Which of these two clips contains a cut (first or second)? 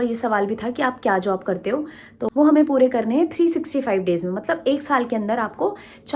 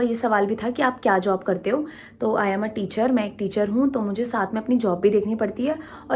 first